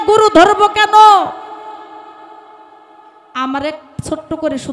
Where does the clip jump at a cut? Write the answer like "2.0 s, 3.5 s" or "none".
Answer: none